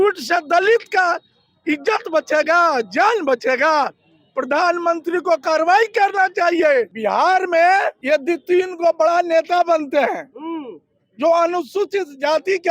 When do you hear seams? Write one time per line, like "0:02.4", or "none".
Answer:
0:06.9
0:08.0